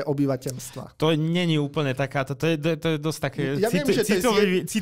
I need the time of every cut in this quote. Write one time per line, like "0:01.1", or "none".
none